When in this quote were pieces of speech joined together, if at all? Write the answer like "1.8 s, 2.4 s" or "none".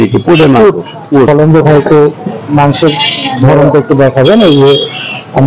1.3 s